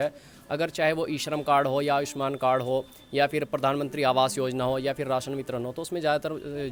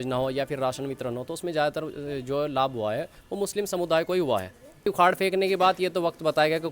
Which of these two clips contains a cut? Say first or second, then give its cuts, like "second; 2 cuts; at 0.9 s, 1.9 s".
second; 1 cut; at 4.9 s